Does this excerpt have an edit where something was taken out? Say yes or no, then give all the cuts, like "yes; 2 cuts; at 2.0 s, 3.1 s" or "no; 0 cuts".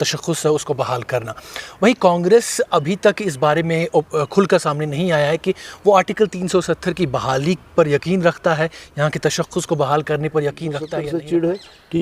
yes; 1 cut; at 10.9 s